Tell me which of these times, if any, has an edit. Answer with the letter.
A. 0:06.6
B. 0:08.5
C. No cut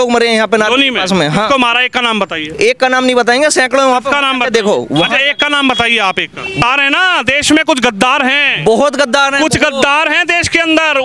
A